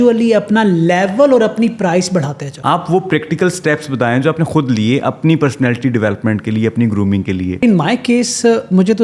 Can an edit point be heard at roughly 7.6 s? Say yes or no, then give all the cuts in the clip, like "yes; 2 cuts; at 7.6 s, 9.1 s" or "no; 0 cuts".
yes; 2 cuts; at 2.4 s, 7.6 s